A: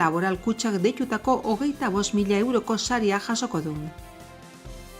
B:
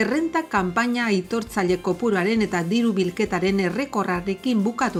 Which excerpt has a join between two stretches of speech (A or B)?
A